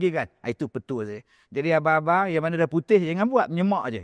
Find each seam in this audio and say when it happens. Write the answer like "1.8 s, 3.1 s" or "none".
none